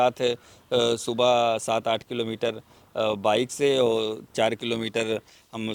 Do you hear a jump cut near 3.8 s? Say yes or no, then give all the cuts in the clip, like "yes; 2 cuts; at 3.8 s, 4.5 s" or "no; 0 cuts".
no; 0 cuts